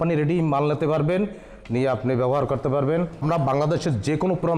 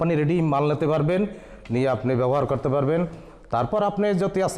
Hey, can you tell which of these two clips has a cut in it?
first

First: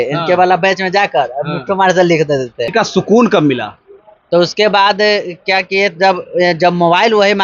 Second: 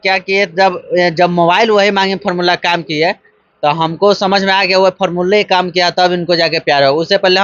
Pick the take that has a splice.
first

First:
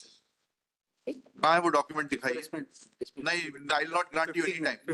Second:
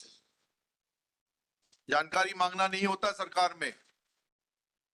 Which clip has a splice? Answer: first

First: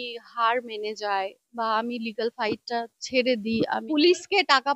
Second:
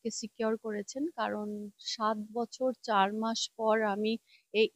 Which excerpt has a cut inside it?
first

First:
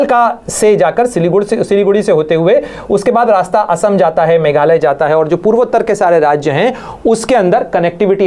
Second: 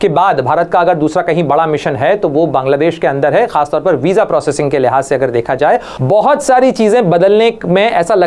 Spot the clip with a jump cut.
second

